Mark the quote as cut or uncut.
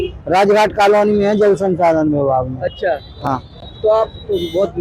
uncut